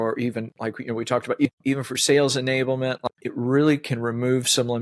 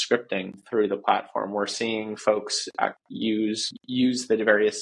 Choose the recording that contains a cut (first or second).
first